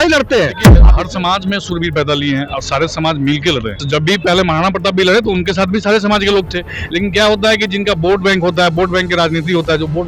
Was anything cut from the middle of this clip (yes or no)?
yes